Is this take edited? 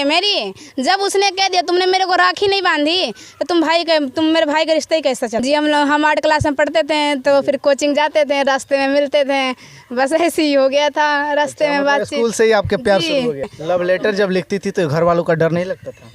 yes; 2 cuts; at 5.4 s, 13.5 s

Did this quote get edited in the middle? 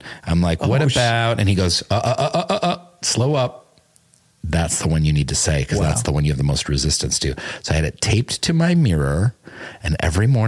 no; 0 cuts

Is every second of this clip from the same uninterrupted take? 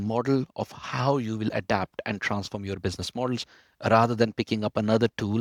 yes; 0 cuts

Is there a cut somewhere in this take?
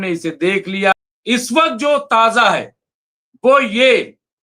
yes; 1 cut; at 0.9 s

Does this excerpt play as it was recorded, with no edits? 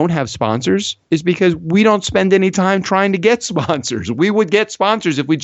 yes; 0 cuts

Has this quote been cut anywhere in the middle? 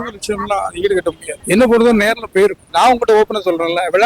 yes; 2 cuts; at 1.3 s, 2.6 s

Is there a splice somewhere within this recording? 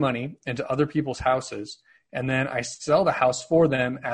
no; 0 cuts

